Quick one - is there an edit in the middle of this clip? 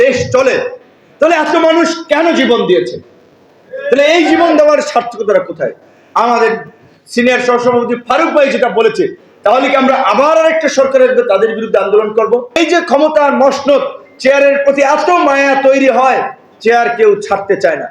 yes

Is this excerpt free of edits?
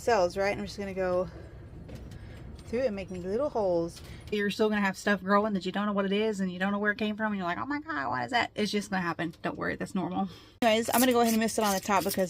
no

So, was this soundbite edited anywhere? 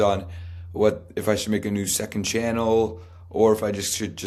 no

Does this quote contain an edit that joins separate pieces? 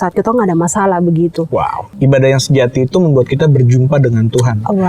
yes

